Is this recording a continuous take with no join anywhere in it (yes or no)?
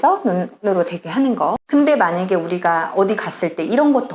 no